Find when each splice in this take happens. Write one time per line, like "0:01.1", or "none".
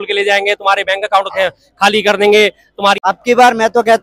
0:03.0

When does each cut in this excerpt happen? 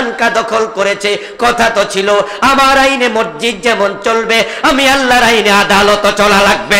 none

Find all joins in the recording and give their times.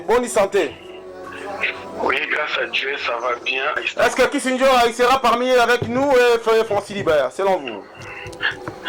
0:03.8

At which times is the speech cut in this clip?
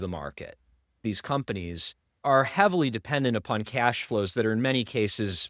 0:01.0
0:02.1

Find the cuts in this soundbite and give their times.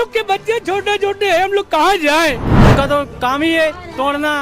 0:02.5

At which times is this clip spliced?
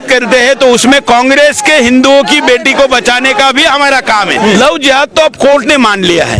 0:04.6

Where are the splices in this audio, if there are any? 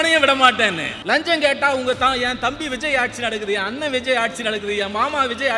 0:00.9

